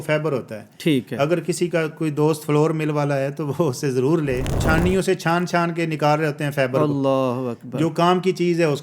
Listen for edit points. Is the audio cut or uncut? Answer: cut